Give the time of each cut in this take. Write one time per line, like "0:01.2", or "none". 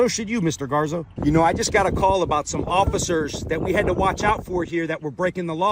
0:01.1